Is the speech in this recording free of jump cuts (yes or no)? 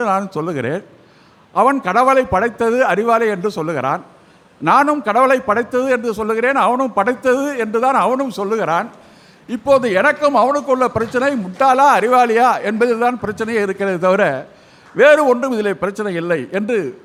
yes